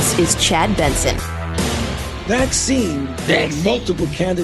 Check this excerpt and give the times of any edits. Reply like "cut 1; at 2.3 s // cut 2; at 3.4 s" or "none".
cut 1; at 2.1 s